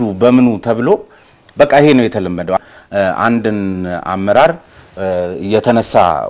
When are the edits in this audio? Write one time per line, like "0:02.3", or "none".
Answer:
0:02.6